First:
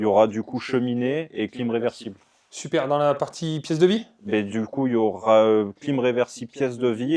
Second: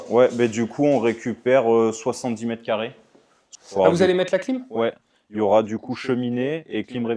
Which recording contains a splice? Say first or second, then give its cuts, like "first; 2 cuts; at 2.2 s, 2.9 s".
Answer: second; 1 cut; at 3.4 s